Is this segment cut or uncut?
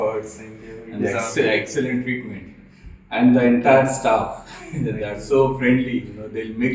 uncut